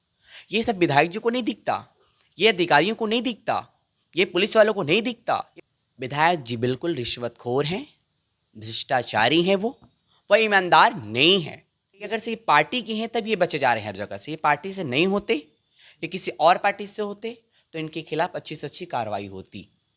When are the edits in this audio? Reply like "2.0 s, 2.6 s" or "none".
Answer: 5.5 s, 12.1 s